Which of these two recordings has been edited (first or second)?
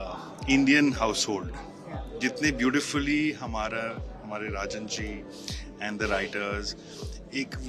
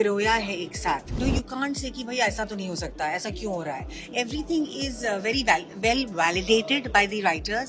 second